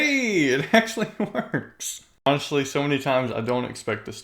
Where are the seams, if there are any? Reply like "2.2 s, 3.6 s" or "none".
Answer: 2.3 s